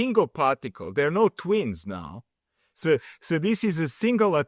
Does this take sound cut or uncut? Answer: uncut